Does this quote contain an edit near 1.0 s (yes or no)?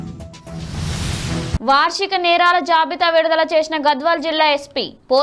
yes